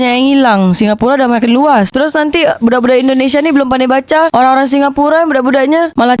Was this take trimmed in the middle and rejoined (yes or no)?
no